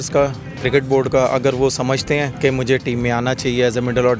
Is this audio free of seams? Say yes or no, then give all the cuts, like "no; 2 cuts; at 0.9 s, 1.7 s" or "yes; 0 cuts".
no; 1 cut; at 2.3 s